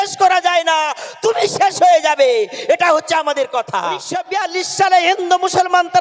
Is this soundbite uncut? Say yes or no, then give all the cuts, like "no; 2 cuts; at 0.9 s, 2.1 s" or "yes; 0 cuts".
no; 1 cut; at 4.1 s